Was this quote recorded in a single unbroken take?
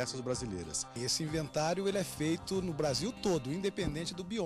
no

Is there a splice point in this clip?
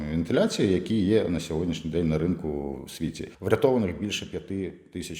yes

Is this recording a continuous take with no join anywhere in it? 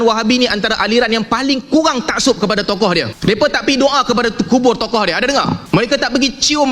no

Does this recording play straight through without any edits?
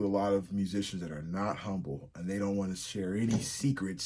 yes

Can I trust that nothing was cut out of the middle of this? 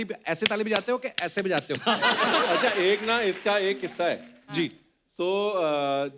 no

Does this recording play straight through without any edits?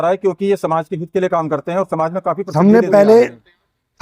no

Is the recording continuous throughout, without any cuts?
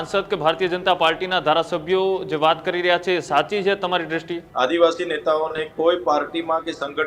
no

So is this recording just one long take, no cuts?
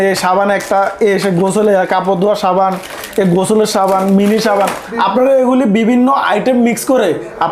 yes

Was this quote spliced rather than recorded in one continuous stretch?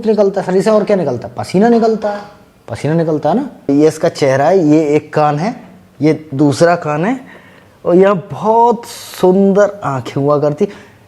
yes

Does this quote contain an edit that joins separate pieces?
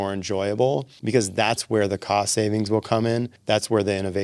yes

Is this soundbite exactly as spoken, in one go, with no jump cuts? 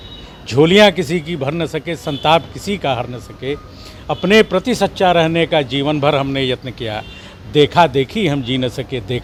yes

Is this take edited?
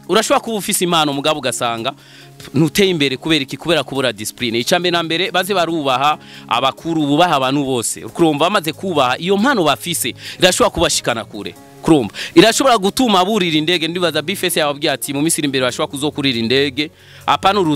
no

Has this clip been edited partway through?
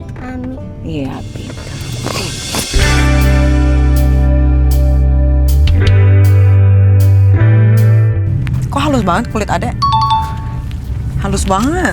no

